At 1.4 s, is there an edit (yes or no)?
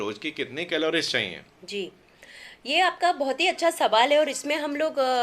no